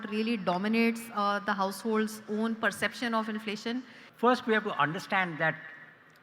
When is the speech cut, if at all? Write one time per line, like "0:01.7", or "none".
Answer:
0:04.0